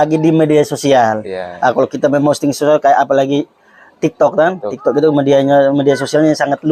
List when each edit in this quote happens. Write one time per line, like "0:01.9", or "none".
none

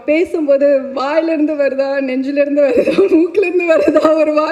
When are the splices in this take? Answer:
none

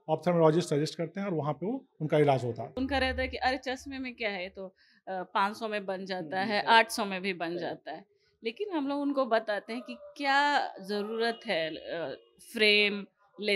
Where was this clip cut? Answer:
0:02.7

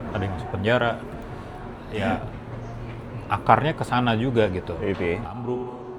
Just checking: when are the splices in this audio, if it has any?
none

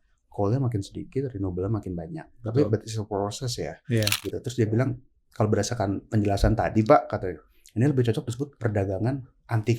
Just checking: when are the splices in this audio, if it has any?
0:04.3

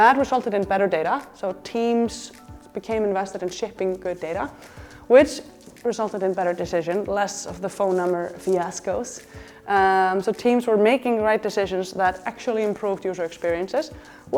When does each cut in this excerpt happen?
none

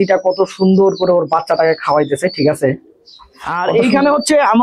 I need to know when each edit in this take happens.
0:03.6

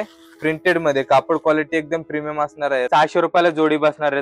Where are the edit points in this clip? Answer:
0:02.9

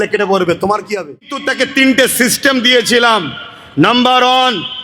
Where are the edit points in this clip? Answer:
0:01.5

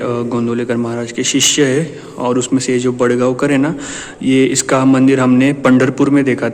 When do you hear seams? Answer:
none

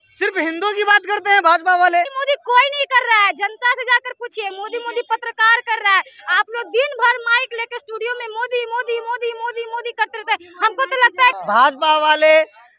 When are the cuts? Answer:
0:02.1
0:11.4

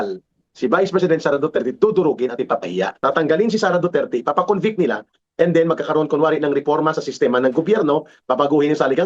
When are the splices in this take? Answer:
0:02.9

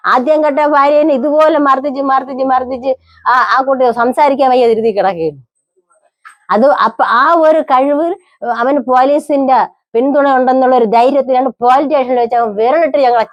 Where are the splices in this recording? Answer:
none

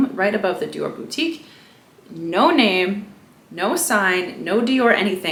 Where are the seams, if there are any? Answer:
none

